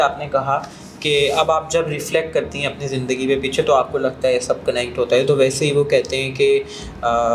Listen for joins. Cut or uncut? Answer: uncut